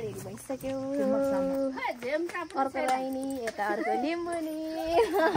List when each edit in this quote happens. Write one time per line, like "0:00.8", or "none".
none